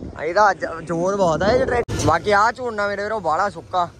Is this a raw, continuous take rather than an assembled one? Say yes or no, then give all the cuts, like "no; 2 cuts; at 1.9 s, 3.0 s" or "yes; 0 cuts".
no; 1 cut; at 1.9 s